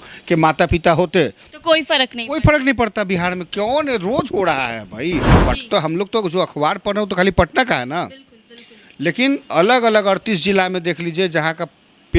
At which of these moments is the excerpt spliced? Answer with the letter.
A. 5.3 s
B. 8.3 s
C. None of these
A